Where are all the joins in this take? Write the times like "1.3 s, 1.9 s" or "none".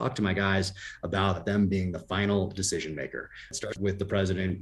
1.4 s, 3.7 s

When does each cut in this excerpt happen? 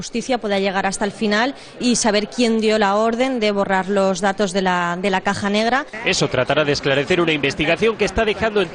6.2 s

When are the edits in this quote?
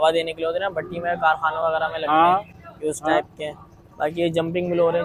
none

